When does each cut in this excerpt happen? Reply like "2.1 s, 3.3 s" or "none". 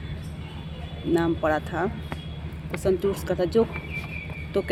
none